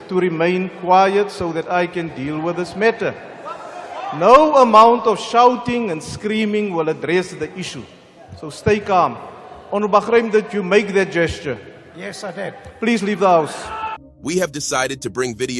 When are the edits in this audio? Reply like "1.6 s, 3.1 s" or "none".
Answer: 13.9 s